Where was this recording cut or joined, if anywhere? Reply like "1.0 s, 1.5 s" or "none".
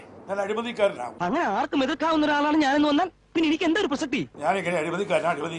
4.3 s